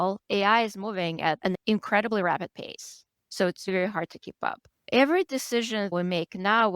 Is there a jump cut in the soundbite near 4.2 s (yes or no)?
no